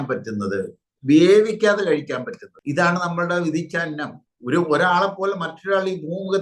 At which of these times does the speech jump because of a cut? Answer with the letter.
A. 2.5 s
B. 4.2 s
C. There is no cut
B